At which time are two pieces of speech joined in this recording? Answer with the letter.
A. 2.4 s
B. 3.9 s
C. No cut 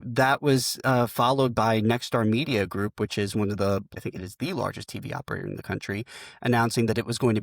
B